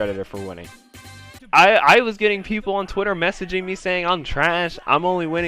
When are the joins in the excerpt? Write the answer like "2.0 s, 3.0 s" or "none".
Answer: 0.9 s